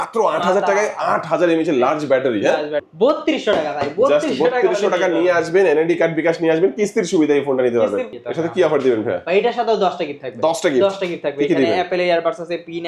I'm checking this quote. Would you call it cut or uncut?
cut